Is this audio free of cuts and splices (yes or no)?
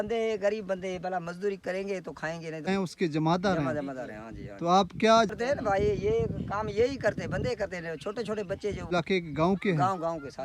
no